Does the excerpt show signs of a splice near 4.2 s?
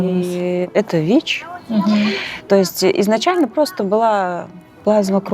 no; 1 cut; at 2.4 s

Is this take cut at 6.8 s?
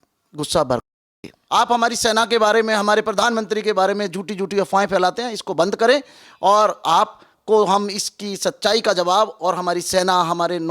no; 1 cut; at 1.3 s

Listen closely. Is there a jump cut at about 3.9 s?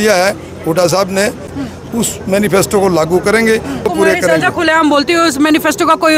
yes; 2 cuts; at 1.5 s, 3.9 s

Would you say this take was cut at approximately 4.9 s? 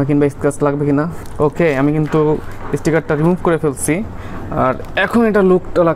no; 1 cut; at 1.2 s

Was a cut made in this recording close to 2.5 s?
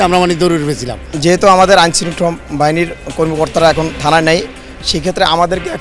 no; 1 cut; at 1.1 s

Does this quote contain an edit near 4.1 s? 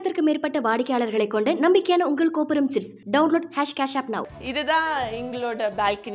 yes; 1 cut; at 4.1 s

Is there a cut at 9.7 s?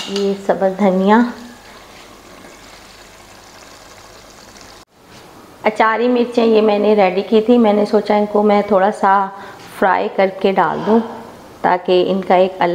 no; 1 cut; at 4.9 s

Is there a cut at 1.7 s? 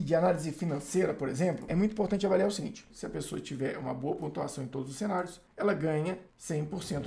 yes; 2 cuts; at 1.7 s, 2.9 s

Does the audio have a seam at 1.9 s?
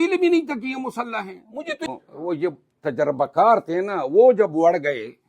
yes; 1 cut; at 1.9 s

